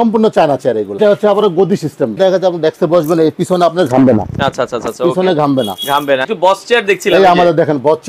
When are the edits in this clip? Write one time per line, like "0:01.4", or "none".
0:01.0
0:02.2
0:06.3